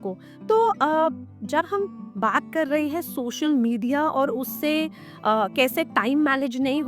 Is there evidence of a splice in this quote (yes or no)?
no